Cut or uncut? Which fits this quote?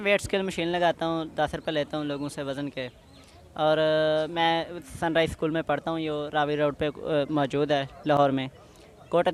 uncut